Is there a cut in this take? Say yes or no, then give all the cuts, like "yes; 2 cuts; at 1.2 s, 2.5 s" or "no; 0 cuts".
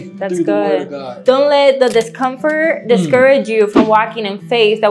yes; 1 cut; at 1.1 s